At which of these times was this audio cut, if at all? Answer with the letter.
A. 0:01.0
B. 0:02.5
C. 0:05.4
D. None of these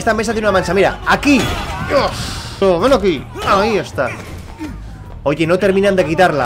B